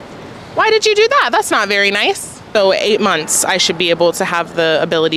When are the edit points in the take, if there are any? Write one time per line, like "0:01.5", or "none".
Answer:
0:02.3

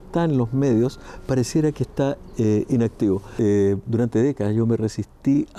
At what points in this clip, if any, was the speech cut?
0:03.3

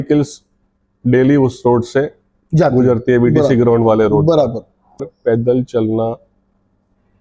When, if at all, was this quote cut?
0:05.0

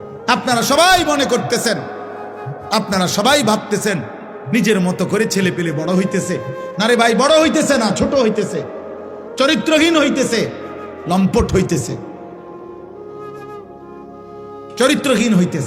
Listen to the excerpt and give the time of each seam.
0:12.1
0:14.2

